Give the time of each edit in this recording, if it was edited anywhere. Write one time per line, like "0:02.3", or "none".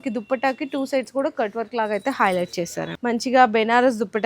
0:02.9